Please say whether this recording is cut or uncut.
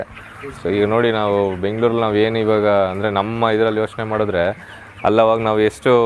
uncut